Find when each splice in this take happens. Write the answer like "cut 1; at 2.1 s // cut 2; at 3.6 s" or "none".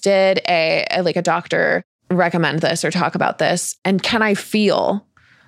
cut 1; at 1.9 s // cut 2; at 3.7 s